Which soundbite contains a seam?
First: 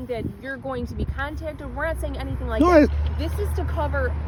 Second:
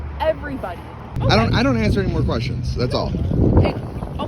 second; 1 cut; at 1.0 s

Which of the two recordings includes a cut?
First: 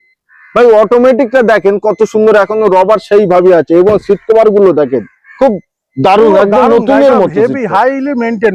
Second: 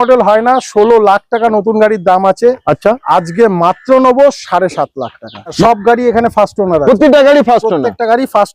second; 1 cut; at 5.6 s

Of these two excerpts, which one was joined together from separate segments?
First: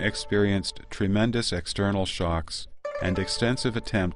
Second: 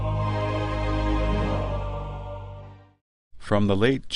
first; 1 cut; at 2.1 s

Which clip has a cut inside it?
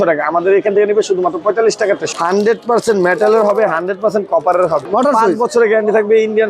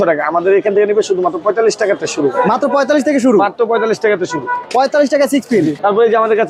first; 2 cuts; at 2.1 s, 4.9 s

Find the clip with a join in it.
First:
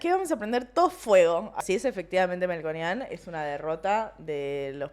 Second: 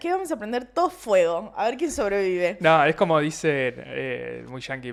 first; 1 cut; at 1.5 s

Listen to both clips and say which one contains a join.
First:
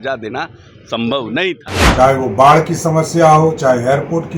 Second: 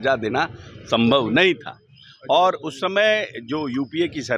first; 1 cut; at 1.7 s

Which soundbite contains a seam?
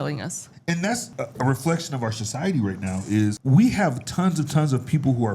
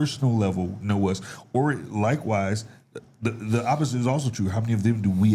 first; 2 cuts; at 1.0 s, 3.4 s

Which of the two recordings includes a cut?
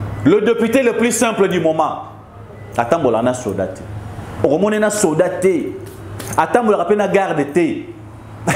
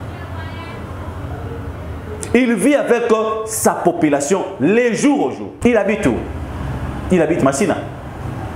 second; 1 cut; at 5.5 s

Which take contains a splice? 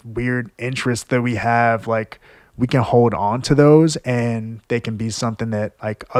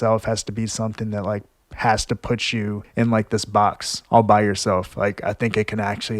second; 1 cut; at 2.8 s

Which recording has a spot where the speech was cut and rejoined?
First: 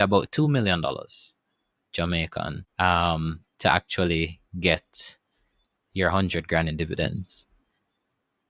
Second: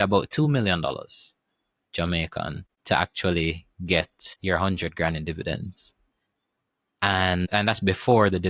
second; 3 cuts; at 2.7 s, 4.2 s, 7.5 s

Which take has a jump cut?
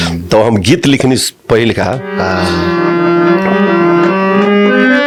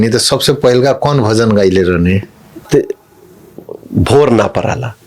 second; 1 cut; at 2.6 s

